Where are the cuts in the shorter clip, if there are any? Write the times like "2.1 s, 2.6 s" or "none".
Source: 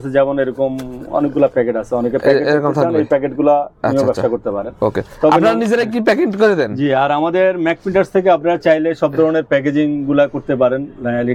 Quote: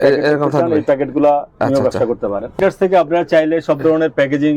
2.5 s